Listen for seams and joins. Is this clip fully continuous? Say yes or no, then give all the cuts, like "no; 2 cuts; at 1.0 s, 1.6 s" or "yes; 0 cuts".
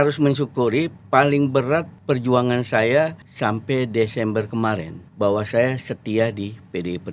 no; 3 cuts; at 1.9 s, 3.2 s, 5.0 s